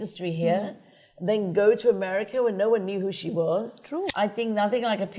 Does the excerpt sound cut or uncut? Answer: cut